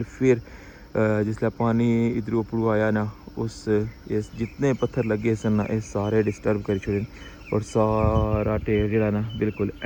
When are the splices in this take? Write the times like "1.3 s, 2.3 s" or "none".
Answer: none